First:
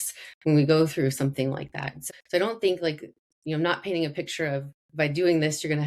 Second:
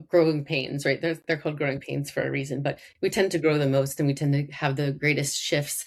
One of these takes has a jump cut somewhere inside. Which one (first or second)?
first